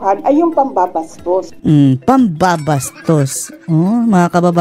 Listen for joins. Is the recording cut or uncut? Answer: uncut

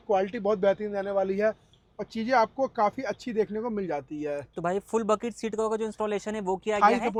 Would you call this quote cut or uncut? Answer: uncut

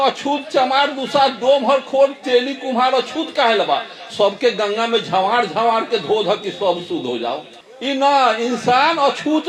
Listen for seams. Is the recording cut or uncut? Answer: uncut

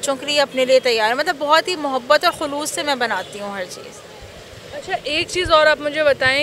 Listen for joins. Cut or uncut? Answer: uncut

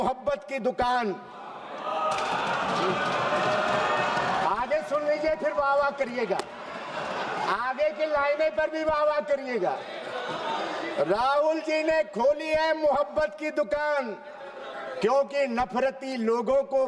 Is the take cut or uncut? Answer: uncut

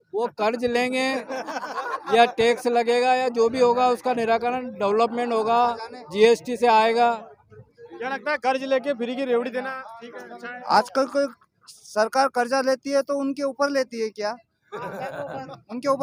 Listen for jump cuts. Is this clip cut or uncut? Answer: uncut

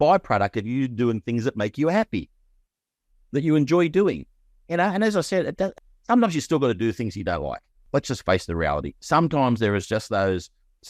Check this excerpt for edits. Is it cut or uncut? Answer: cut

